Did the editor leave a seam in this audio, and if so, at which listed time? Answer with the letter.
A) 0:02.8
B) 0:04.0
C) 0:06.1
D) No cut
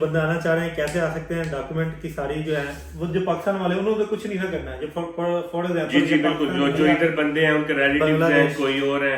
D